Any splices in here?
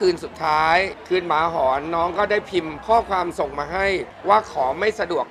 yes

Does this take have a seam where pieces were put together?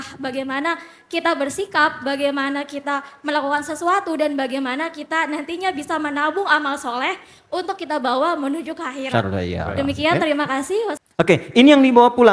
yes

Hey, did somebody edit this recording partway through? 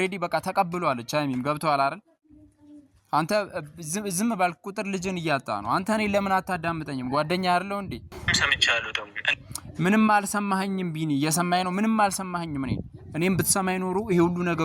yes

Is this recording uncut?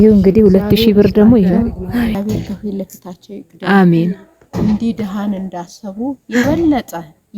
no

